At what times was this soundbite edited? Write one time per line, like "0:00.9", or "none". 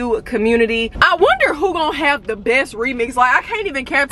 0:00.9

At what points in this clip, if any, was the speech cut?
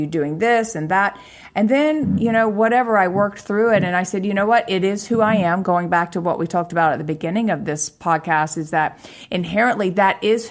none

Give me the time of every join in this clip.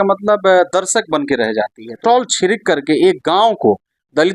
0:02.0

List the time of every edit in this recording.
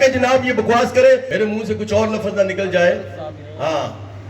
0:01.3

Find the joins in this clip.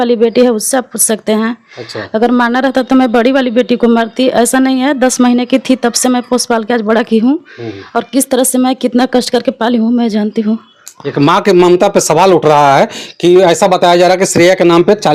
none

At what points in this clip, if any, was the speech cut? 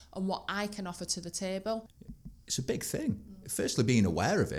0:02.0

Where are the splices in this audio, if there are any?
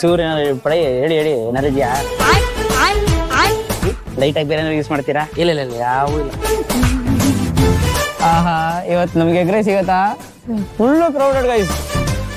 0:08.1

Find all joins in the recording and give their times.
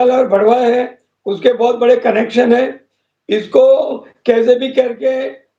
none

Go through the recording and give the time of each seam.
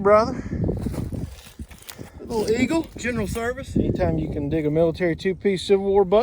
0:04.0

